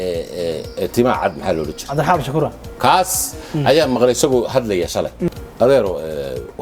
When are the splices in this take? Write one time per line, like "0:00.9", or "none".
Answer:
0:05.3